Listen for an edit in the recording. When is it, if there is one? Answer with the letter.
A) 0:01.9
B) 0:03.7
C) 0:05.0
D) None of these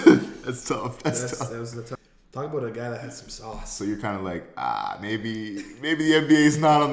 A